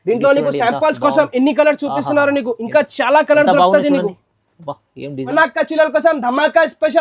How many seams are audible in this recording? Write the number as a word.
one